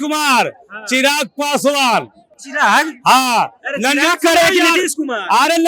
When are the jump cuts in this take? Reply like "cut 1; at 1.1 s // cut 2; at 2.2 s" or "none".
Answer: none